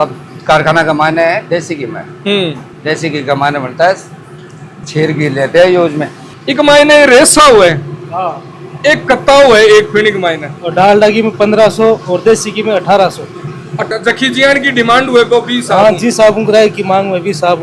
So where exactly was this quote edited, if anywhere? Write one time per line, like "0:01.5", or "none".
0:06.2
0:13.9